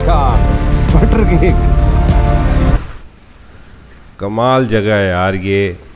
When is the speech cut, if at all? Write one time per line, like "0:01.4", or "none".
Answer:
0:02.8